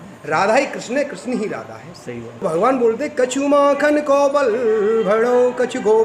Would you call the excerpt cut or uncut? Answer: cut